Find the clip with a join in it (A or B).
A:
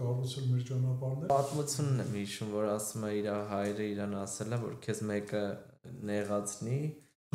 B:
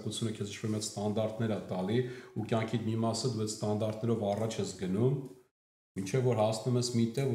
A